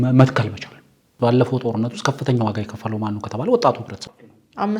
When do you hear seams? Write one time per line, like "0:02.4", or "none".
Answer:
0:01.1